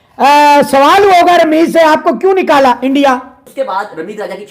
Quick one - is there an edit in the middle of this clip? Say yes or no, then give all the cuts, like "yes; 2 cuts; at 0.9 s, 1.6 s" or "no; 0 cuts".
yes; 1 cut; at 3.4 s